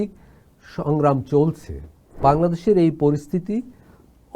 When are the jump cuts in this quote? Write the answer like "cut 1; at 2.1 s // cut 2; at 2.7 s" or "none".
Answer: cut 1; at 2.2 s